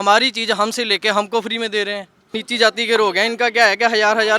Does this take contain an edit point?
yes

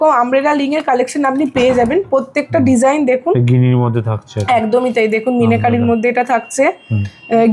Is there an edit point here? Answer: no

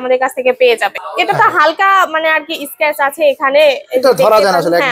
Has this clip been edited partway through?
yes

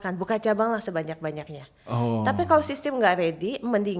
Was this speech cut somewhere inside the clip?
no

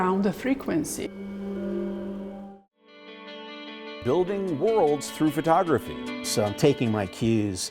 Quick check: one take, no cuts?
no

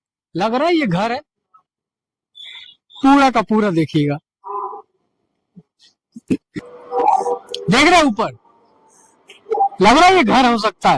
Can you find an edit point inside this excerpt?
yes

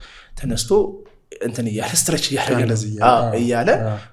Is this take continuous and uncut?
yes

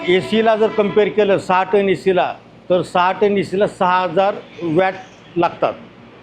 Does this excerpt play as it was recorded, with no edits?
yes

